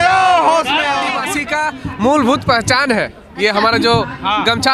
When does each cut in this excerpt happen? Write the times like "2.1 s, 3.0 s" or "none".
1.3 s